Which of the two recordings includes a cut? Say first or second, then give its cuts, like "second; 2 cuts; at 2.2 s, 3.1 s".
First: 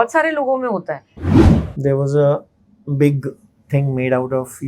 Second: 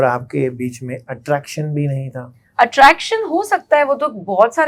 first; 1 cut; at 1.3 s